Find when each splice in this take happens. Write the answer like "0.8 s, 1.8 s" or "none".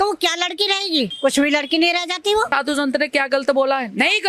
1.1 s, 2.5 s